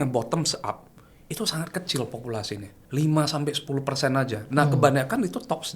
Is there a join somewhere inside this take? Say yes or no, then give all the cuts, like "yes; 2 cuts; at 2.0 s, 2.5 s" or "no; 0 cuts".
yes; 1 cut; at 2.7 s